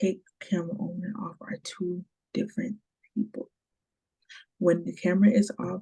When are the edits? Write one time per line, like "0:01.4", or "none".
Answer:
none